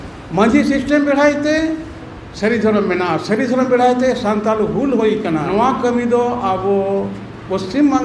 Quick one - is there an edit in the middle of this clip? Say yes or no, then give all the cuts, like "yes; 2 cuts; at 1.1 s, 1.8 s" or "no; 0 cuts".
yes; 1 cut; at 5.5 s